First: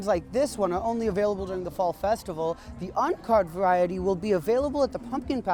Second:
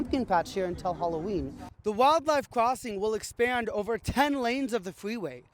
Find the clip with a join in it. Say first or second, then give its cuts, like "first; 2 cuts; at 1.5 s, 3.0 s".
second; 1 cut; at 1.7 s